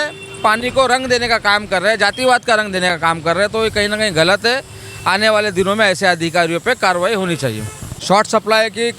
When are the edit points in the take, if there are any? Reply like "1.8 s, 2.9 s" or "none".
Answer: 7.9 s